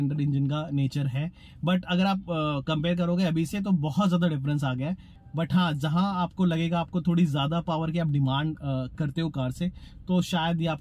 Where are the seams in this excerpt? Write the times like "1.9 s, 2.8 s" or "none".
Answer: 5.2 s